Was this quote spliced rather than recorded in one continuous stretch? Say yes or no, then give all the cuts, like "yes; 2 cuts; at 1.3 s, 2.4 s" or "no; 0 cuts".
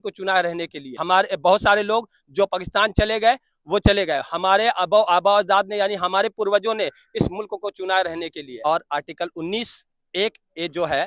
yes; 2 cuts; at 0.9 s, 8.5 s